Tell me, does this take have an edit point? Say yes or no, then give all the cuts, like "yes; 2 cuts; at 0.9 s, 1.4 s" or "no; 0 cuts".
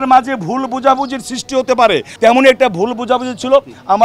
yes; 1 cut; at 2.1 s